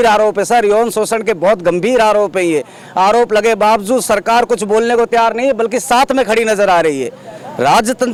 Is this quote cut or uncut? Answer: uncut